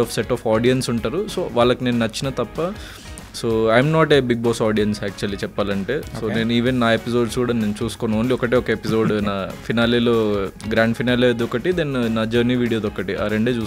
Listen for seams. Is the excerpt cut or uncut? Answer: uncut